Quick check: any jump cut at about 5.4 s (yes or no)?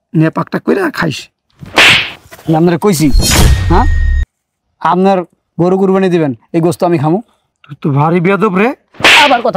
no